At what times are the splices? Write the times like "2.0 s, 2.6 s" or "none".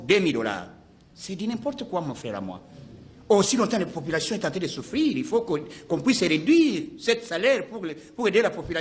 none